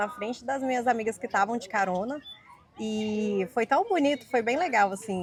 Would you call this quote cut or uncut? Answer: uncut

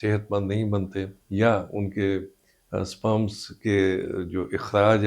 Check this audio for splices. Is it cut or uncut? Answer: cut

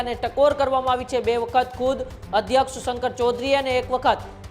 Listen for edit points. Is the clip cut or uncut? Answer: uncut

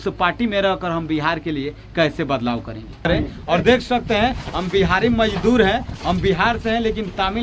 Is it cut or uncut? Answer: cut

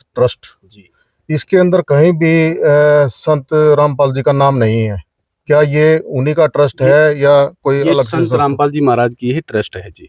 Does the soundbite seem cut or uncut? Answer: uncut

